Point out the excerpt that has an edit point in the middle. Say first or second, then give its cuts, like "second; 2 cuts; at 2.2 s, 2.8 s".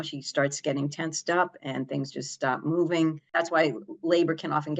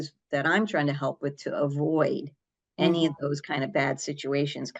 first; 1 cut; at 3.2 s